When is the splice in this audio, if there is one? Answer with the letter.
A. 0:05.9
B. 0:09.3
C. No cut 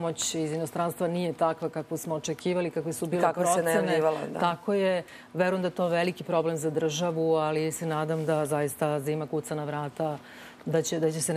B